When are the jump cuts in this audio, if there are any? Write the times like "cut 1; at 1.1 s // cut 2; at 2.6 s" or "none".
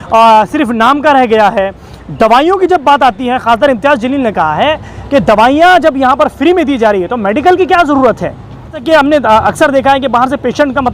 cut 1; at 8.8 s

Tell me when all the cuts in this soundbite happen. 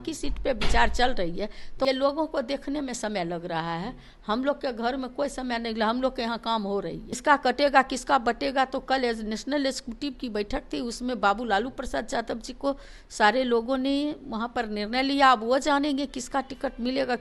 cut 1; at 1.9 s // cut 2; at 7.1 s

